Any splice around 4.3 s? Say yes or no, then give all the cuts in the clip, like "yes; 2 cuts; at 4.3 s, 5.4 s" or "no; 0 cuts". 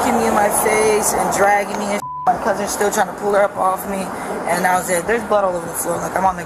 no; 0 cuts